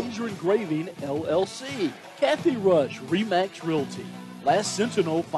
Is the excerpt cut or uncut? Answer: cut